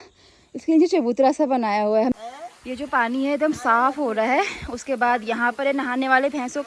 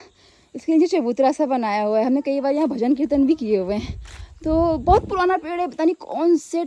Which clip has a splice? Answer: first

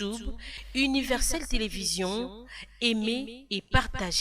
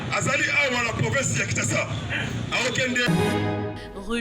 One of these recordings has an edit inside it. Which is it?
second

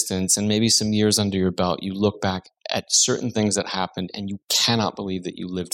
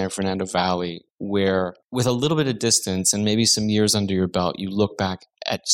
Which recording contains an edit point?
second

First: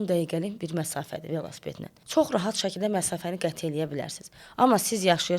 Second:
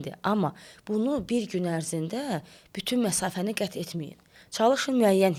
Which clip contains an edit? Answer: first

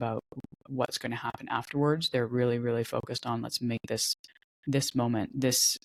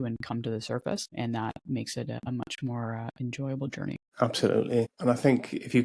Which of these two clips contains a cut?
second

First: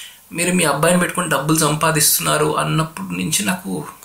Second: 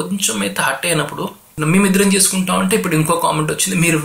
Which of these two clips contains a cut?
second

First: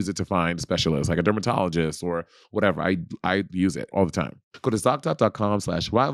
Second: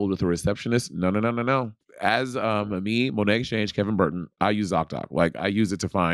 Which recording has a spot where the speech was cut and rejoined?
second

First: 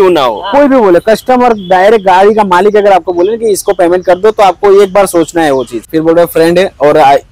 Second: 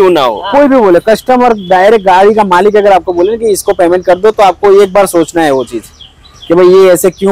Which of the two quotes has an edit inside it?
first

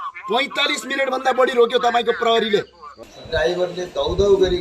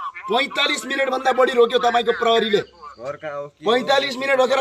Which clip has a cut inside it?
first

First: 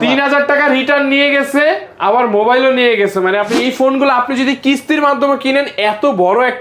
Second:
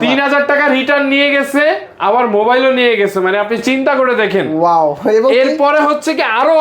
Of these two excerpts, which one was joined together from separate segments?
first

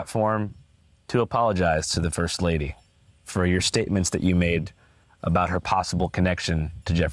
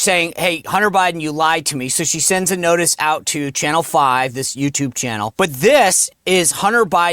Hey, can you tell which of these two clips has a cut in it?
second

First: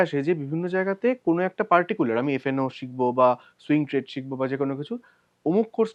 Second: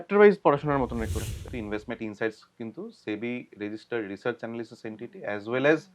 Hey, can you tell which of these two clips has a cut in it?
second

